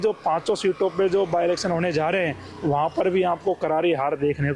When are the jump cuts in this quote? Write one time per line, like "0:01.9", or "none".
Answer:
none